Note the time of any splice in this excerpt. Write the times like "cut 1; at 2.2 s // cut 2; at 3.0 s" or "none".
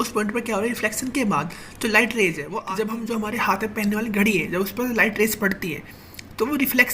cut 1; at 2.5 s